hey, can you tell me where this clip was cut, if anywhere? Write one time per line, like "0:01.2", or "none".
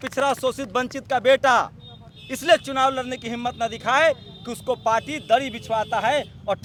none